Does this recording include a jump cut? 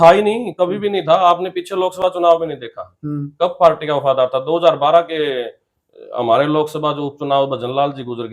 no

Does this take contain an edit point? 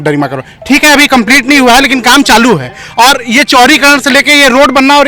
no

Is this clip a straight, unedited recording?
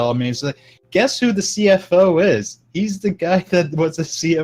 yes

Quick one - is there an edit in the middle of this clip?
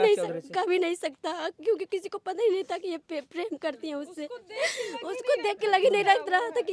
no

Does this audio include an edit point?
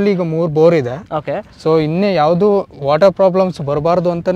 no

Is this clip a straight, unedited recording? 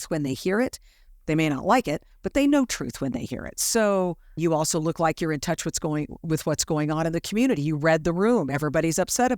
no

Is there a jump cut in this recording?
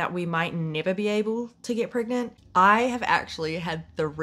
yes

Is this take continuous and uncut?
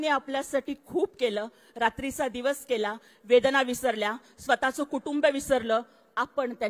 yes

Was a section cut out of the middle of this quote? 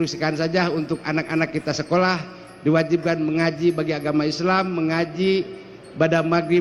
no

